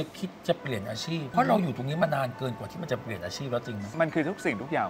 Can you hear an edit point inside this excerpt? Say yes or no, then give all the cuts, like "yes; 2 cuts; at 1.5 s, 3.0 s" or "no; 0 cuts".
yes; 2 cuts; at 1.3 s, 3.9 s